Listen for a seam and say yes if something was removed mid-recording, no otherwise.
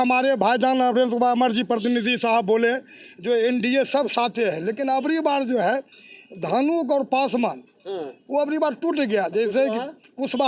no